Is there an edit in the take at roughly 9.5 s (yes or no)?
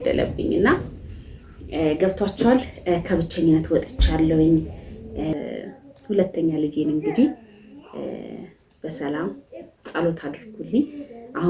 no